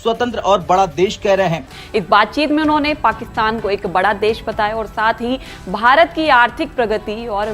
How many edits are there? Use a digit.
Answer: 1